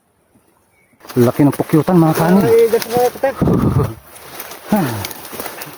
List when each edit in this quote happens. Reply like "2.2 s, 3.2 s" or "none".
0.9 s